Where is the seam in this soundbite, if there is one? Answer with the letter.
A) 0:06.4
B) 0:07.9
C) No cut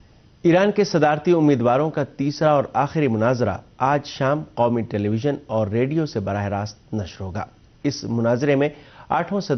A